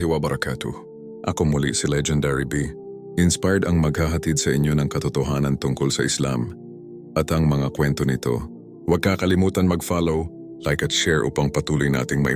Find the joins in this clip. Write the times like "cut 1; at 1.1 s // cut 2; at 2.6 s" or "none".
cut 1; at 1.0 s

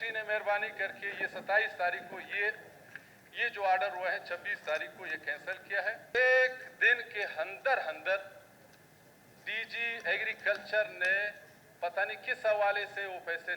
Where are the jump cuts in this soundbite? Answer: cut 1; at 6.1 s

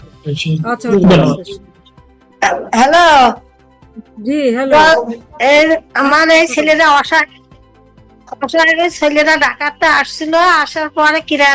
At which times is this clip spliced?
cut 1; at 2.2 s

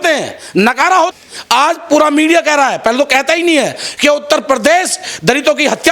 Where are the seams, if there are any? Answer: cut 1; at 1.1 s

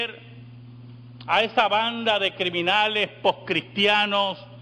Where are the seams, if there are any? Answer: cut 1; at 1.7 s

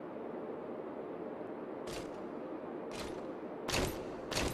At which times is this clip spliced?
cut 1; at 1.3 s

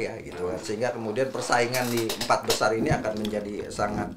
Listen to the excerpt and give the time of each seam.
none

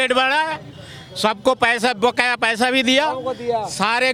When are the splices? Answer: none

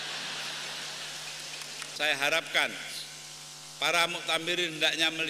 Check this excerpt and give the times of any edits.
cut 1; at 1.8 s

